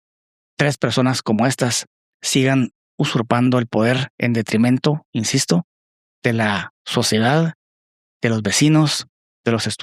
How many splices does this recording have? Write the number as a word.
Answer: zero